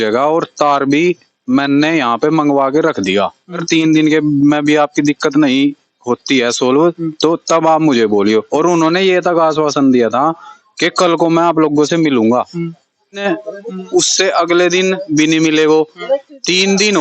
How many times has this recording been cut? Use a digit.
2